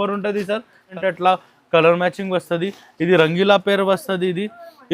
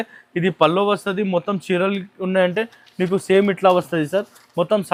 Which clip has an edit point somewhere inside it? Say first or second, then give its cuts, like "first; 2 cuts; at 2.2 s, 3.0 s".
first; 1 cut; at 0.9 s